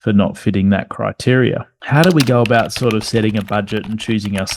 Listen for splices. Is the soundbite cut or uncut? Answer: cut